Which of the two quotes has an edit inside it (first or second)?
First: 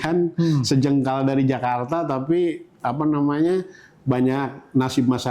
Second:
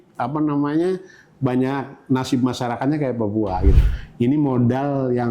second